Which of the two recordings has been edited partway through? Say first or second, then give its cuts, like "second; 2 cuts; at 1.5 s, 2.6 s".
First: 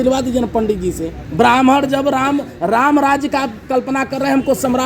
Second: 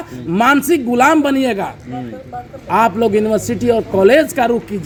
first; 1 cut; at 1.2 s